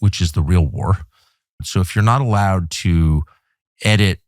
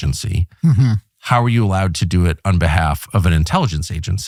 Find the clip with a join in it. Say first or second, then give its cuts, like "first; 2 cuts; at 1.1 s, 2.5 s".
first; 1 cut; at 1.6 s